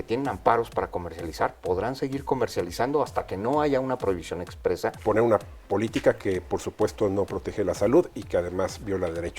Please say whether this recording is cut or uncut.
cut